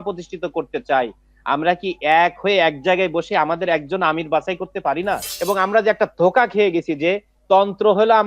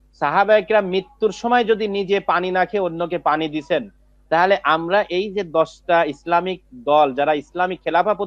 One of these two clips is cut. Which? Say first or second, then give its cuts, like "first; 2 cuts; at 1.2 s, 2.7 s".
first; 1 cut; at 5.3 s